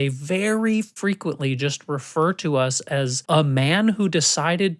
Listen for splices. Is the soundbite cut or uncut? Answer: cut